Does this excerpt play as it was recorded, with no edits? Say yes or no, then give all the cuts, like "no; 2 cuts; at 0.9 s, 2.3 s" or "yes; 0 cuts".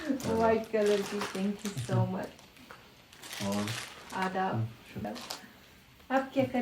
no; 1 cut; at 5.0 s